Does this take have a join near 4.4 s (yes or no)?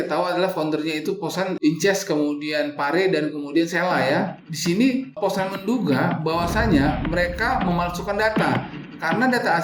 yes